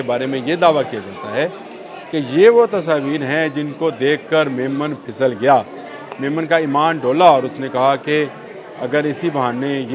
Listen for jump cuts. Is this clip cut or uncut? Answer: uncut